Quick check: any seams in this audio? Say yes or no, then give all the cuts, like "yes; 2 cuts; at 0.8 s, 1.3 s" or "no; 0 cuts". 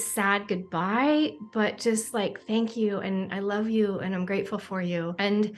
no; 0 cuts